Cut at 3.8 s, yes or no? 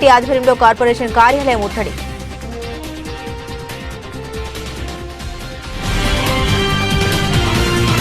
no